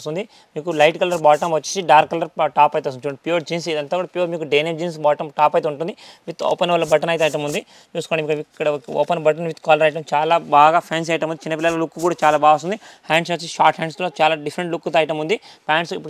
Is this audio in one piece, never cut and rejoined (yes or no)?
yes